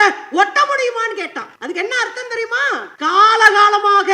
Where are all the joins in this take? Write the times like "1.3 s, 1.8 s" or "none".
1.5 s, 2.9 s